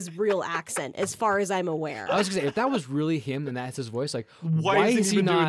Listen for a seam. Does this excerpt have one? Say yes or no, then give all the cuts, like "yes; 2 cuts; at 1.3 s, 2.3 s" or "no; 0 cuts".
yes; 1 cut; at 2.1 s